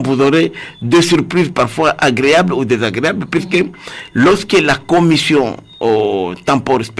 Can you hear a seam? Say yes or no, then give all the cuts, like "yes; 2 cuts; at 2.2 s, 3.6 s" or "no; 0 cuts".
no; 0 cuts